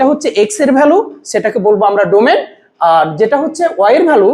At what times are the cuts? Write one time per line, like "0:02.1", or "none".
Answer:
none